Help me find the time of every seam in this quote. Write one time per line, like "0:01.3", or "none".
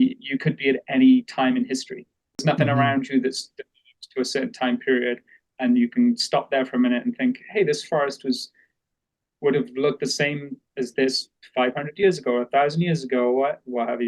0:02.2